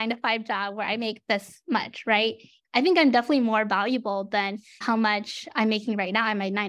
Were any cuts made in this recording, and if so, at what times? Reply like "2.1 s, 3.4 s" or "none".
2.5 s